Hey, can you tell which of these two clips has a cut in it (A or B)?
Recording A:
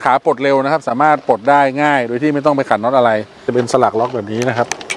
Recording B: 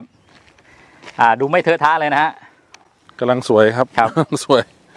A